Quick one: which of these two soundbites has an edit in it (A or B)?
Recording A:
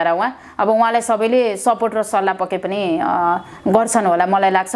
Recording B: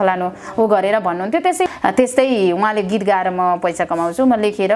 B